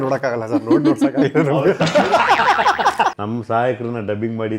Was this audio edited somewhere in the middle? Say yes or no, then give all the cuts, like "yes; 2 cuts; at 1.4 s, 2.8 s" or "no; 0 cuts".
yes; 1 cut; at 3.1 s